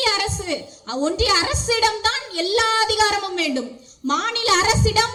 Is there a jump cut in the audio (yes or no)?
no